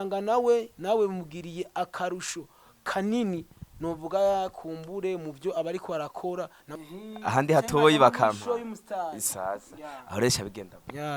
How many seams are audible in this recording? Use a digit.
1